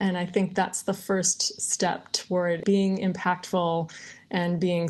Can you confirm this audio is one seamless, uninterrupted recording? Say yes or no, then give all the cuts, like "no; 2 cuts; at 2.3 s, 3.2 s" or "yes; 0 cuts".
no; 1 cut; at 2.6 s